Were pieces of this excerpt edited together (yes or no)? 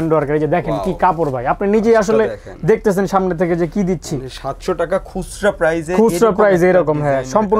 no